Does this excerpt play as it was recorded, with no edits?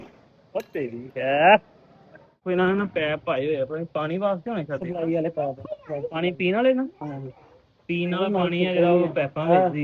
no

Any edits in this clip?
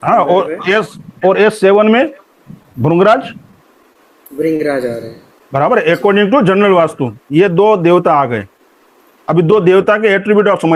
no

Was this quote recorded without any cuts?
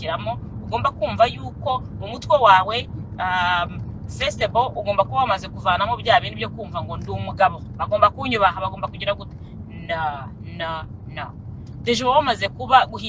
yes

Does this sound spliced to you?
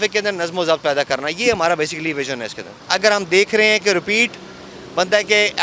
yes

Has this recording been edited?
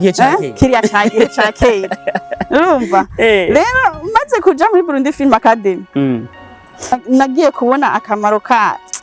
yes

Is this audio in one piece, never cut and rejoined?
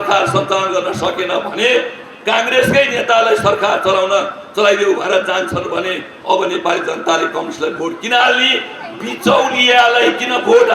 yes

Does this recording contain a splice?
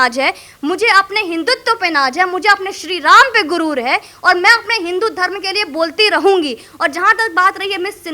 no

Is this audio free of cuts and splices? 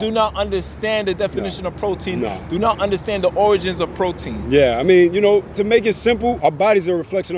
no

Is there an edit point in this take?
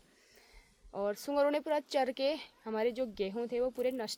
no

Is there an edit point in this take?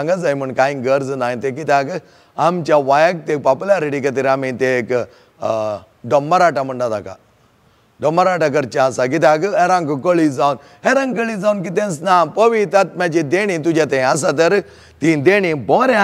no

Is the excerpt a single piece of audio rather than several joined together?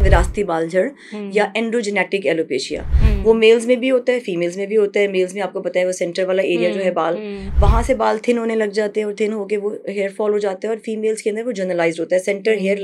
yes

